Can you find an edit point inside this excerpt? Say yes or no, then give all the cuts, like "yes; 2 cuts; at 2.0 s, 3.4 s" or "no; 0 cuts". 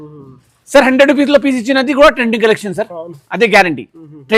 no; 0 cuts